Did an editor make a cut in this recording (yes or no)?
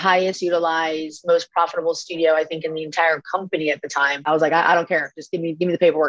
yes